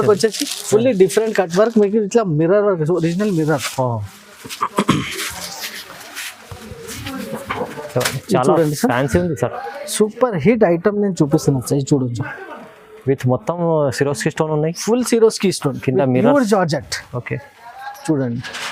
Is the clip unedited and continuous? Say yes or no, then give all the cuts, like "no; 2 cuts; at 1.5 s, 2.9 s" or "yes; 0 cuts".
yes; 0 cuts